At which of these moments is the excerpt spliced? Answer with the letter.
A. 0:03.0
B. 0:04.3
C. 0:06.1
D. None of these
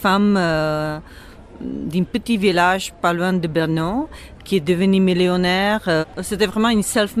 D